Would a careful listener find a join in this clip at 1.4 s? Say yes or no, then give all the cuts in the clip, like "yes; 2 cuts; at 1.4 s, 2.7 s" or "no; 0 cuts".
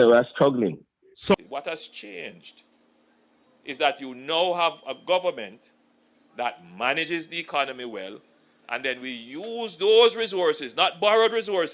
yes; 1 cut; at 1.4 s